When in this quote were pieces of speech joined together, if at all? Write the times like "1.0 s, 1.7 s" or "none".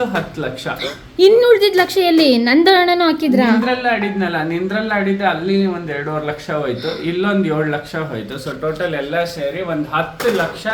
none